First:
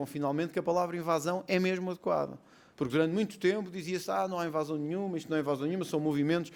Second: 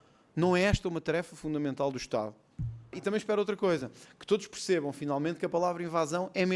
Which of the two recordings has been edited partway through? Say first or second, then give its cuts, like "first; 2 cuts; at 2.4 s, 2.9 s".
second; 1 cut; at 3.0 s